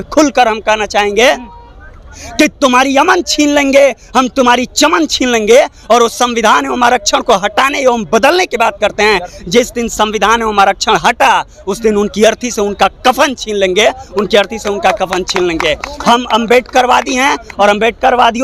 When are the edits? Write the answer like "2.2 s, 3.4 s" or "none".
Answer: none